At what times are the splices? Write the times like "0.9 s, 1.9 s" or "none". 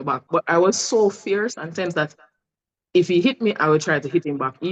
none